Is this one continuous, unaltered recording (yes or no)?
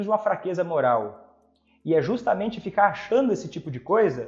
yes